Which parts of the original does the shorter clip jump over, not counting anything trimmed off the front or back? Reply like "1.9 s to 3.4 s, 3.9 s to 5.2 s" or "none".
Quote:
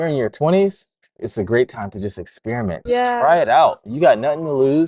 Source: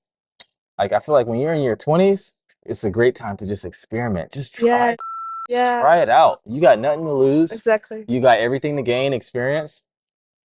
4.2 s to 5.4 s